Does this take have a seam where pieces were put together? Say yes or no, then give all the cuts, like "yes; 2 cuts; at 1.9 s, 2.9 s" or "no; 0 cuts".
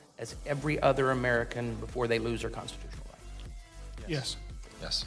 no; 0 cuts